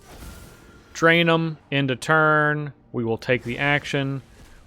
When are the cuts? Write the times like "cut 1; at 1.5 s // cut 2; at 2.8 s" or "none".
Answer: cut 1; at 1.6 s

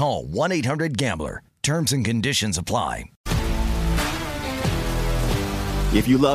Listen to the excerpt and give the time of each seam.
cut 1; at 3.1 s

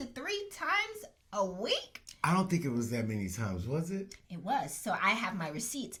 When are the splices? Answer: none

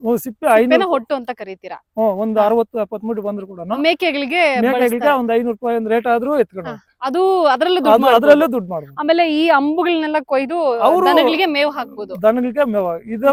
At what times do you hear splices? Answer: none

